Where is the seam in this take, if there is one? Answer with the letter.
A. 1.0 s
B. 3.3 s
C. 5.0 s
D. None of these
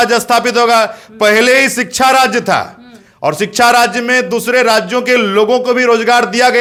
D